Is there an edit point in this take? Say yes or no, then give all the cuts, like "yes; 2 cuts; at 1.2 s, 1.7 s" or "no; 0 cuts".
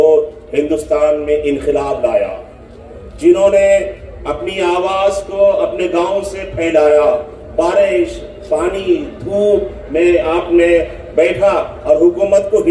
no; 0 cuts